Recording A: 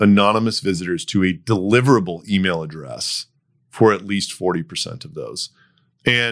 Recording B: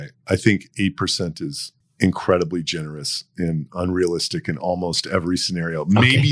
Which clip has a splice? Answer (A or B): B